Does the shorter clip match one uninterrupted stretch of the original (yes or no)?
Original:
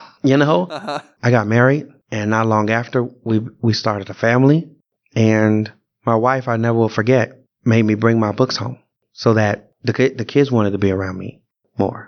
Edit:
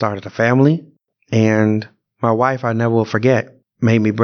yes